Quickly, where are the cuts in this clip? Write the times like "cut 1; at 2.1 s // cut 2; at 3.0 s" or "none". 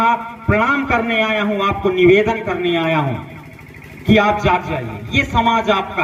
none

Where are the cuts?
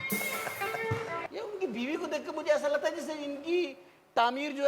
cut 1; at 1.3 s

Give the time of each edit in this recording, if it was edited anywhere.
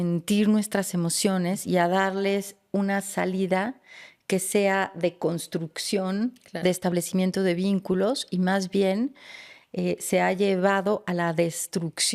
none

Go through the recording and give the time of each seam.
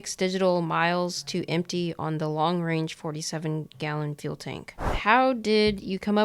cut 1; at 4.9 s

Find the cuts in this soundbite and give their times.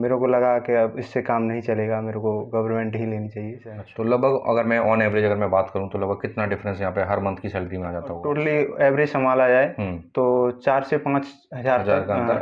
cut 1; at 3.8 s // cut 2; at 8.2 s

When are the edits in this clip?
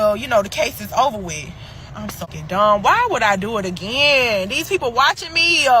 cut 1; at 2.3 s

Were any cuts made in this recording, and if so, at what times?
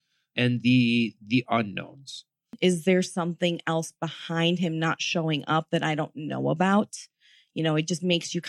cut 1; at 2.5 s

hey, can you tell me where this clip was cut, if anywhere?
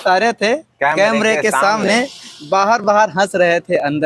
none

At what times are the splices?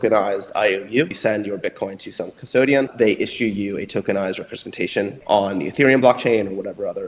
cut 1; at 1.1 s // cut 2; at 2.9 s // cut 3; at 5.2 s

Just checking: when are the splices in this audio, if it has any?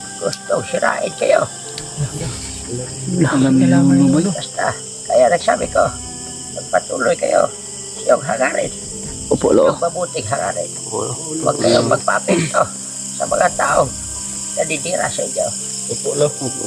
cut 1; at 4.5 s

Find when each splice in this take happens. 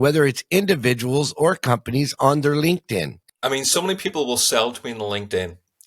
cut 1; at 3.1 s

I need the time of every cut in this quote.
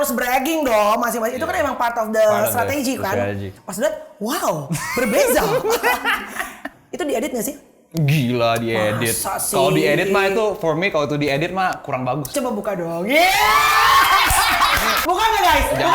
cut 1; at 3.6 s // cut 2; at 6.7 s // cut 3; at 12.3 s // cut 4; at 15.0 s

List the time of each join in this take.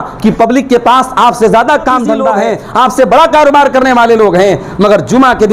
cut 1; at 2.3 s

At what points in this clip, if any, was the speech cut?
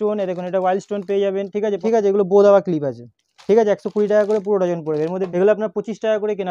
cut 1; at 1.8 s // cut 2; at 5.2 s

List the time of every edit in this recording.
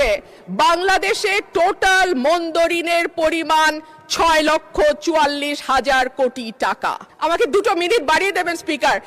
cut 1; at 7.0 s

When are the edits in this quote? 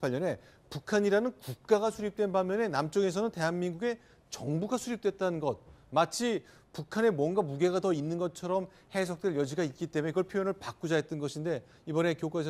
none

